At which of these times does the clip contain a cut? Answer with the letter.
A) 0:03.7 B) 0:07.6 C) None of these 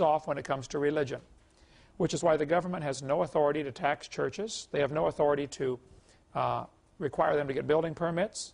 B